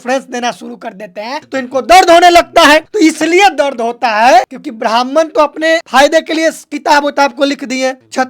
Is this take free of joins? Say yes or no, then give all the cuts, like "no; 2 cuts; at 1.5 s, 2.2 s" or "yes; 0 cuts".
no; 3 cuts; at 1.5 s, 4.6 s, 5.8 s